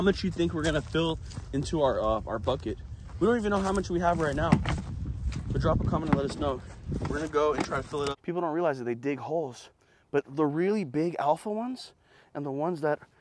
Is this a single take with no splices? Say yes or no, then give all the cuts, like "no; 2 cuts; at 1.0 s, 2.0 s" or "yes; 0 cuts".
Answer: no; 1 cut; at 8.2 s